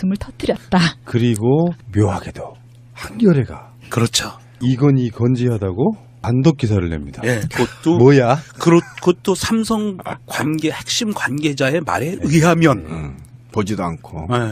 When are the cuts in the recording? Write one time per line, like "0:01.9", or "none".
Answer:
none